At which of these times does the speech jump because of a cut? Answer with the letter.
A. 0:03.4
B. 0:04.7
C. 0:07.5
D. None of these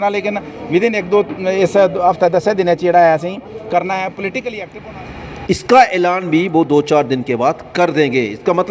B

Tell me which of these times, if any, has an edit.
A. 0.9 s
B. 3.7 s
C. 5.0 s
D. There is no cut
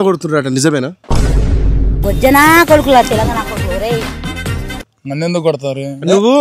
A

